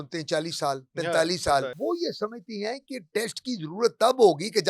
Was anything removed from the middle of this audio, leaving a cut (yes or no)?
yes